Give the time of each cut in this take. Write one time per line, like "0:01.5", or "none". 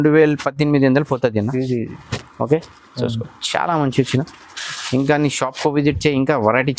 none